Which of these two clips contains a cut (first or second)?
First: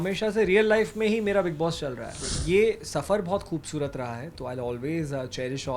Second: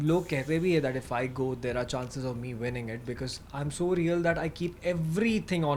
first